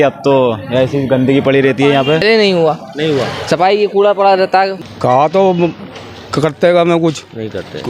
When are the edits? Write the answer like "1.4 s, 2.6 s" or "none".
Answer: 2.2 s, 4.8 s